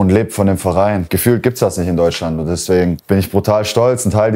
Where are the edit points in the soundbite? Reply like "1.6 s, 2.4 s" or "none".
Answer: 1.1 s, 3.0 s